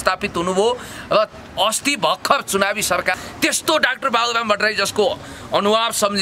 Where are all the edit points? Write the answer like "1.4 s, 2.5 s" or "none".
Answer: 3.2 s